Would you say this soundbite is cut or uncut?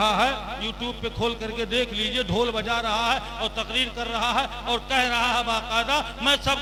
uncut